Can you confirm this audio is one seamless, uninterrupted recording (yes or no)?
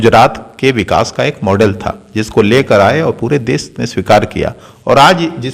yes